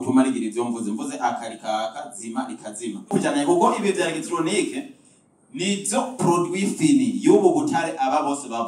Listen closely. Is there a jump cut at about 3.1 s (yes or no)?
yes